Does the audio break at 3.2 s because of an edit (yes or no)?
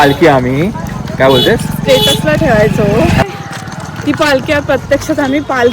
yes